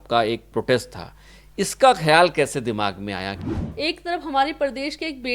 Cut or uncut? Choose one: cut